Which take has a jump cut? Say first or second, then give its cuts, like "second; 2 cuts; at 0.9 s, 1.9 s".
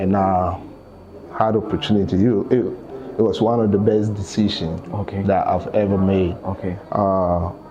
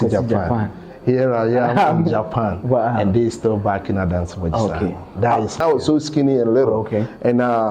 second; 1 cut; at 5.6 s